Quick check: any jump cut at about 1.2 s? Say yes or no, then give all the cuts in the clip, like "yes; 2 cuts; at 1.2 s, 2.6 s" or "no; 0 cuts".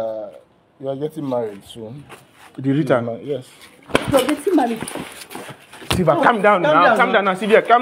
no; 0 cuts